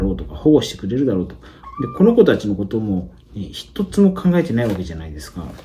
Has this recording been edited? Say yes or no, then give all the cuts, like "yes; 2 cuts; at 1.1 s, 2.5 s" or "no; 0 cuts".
no; 0 cuts